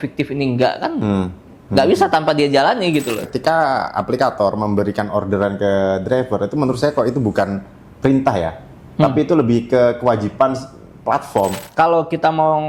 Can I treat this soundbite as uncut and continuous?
no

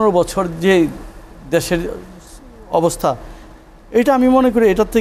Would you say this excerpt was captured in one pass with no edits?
yes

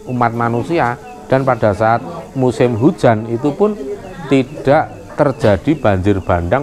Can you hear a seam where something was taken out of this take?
no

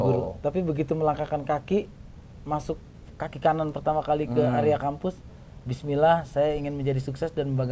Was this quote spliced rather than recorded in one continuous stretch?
no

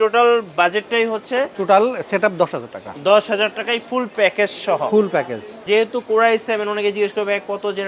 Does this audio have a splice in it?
yes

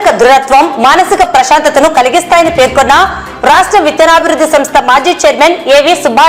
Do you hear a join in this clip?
no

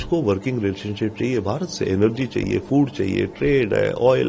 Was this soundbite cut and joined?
no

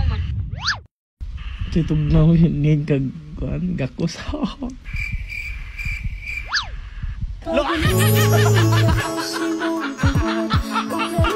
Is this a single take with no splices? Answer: yes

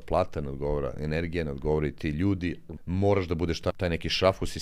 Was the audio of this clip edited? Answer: yes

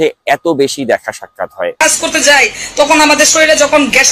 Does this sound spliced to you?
yes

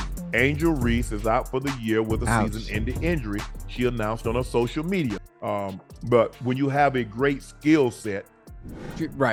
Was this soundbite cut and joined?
no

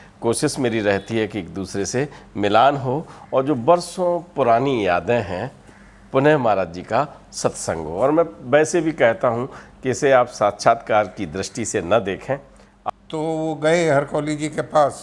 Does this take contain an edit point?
yes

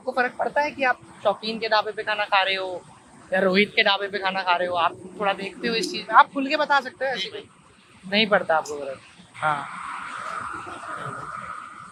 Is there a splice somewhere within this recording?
no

